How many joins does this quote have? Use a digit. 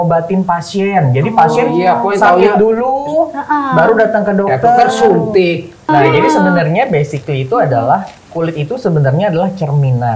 1